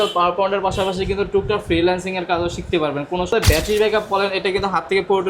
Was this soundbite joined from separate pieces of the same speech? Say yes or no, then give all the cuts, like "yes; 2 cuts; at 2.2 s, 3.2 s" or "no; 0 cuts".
yes; 1 cut; at 3.3 s